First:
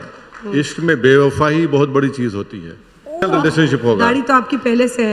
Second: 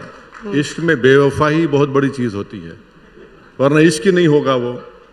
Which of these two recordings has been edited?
first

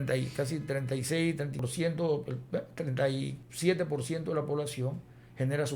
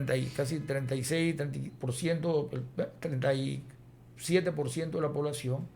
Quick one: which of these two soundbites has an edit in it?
first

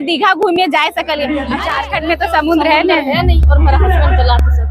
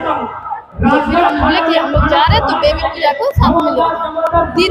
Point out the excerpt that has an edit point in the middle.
first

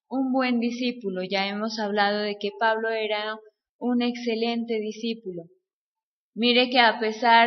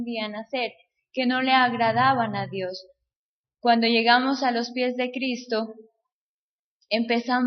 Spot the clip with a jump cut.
second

